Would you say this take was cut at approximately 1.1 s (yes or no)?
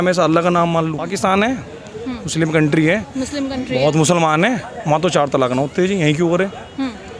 yes